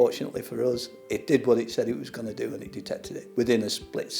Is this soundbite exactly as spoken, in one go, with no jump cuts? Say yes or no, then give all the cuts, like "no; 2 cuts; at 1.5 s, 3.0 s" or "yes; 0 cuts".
no; 1 cut; at 3.2 s